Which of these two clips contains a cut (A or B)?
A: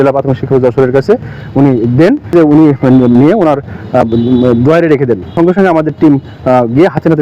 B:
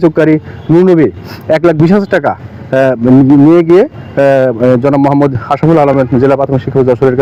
A